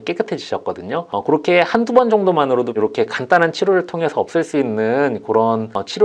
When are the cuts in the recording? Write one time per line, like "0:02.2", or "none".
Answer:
0:02.8